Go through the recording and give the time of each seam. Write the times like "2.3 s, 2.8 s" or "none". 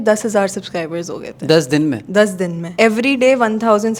none